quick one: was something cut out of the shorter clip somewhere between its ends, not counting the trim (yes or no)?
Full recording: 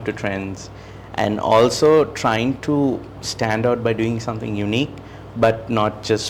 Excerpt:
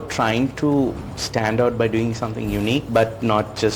yes